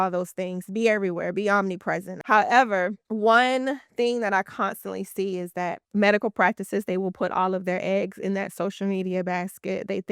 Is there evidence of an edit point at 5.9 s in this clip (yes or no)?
no